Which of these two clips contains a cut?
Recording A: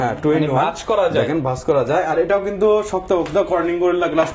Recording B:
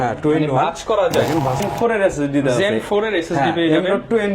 B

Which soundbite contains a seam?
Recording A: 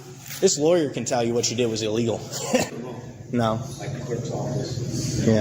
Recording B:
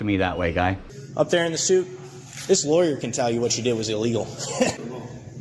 B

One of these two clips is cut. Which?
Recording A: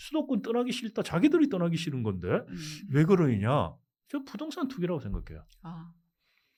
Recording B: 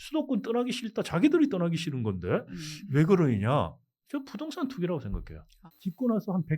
B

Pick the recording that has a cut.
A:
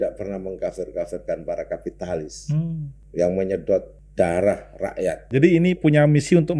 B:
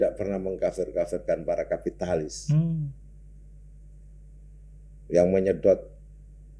A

